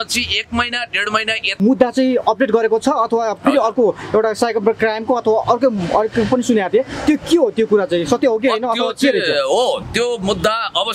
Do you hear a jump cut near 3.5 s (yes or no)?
no